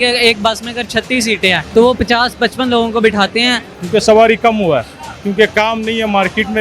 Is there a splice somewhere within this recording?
yes; 2 cuts; at 1.6 s, 3.7 s

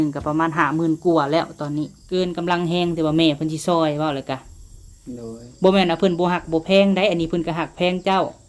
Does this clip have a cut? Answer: yes; 1 cut; at 2.0 s

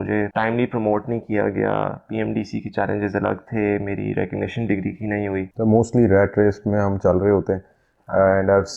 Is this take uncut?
no; 1 cut; at 5.5 s

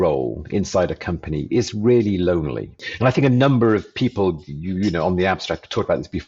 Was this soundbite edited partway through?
yes; 1 cut; at 2.8 s

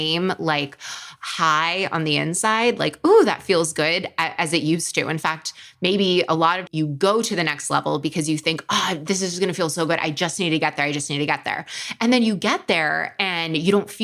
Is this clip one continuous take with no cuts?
yes; 0 cuts

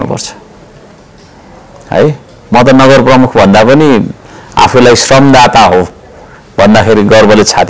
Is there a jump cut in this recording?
no; 0 cuts

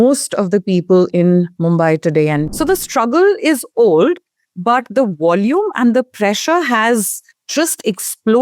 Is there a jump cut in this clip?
yes; 1 cut; at 2.5 s

